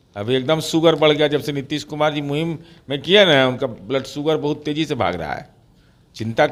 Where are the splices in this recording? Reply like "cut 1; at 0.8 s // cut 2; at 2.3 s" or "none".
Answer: none